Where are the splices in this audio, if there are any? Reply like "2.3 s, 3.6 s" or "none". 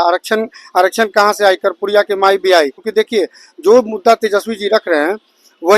2.8 s